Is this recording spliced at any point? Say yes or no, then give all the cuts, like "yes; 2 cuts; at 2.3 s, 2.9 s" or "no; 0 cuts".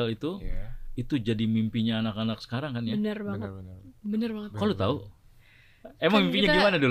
no; 0 cuts